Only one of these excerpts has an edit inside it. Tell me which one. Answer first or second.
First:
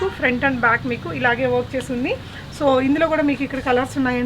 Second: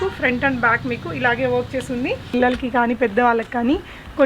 second